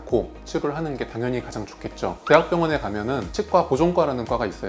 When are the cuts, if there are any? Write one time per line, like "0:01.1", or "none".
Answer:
0:02.2